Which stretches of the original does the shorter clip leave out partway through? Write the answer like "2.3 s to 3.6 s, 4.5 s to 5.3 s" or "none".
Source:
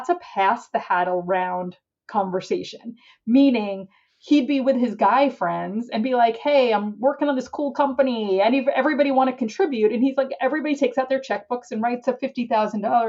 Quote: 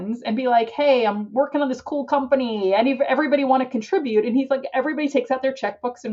none